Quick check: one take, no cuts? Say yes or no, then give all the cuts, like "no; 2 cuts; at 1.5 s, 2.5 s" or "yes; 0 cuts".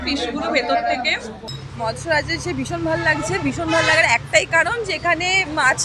no; 1 cut; at 1.5 s